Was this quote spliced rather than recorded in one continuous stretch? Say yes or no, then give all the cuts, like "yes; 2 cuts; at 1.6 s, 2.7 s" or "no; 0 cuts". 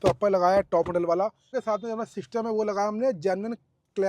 yes; 1 cut; at 1.5 s